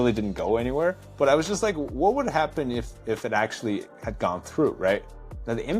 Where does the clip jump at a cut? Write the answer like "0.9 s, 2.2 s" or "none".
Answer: 1.1 s